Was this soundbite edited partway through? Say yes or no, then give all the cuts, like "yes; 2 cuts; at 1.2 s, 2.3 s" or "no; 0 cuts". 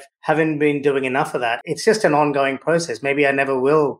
yes; 1 cut; at 1.6 s